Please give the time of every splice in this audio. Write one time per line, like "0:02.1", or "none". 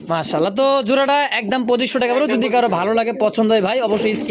none